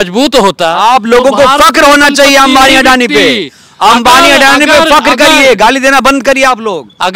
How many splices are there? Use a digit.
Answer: 0